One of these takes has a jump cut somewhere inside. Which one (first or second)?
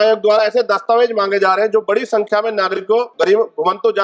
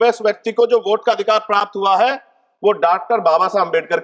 first